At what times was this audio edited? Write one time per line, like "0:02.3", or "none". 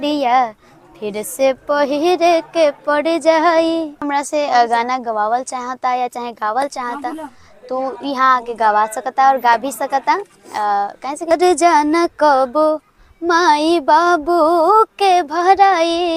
0:04.1
0:11.3